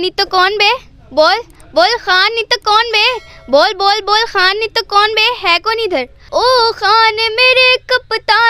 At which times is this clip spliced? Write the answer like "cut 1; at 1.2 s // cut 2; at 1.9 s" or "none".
cut 1; at 6.2 s